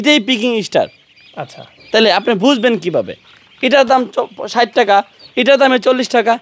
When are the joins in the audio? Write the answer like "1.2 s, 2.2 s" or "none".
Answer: none